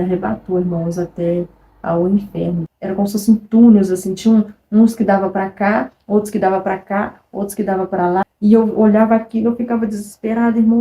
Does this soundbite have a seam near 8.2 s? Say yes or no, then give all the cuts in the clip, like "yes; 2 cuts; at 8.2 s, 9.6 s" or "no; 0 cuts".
yes; 2 cuts; at 2.7 s, 8.2 s